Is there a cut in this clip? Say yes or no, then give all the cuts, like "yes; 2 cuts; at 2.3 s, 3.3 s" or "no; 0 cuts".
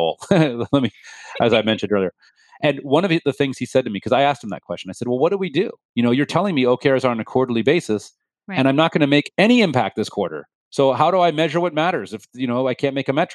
no; 0 cuts